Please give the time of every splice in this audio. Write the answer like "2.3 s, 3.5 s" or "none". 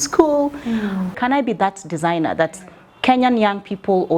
1.2 s